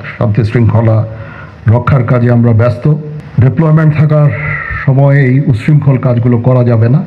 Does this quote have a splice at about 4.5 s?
no; 1 cut; at 3.2 s

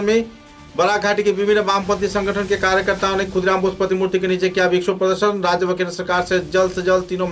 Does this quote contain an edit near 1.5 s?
no; 0 cuts

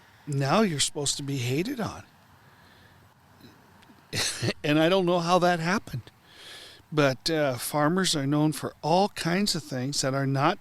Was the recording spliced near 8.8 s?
no; 1 cut; at 3.0 s

